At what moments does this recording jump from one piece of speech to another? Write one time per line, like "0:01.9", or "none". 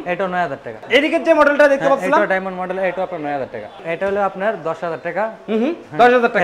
0:00.9
0:03.8